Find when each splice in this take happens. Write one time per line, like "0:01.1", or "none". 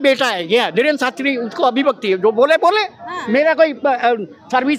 none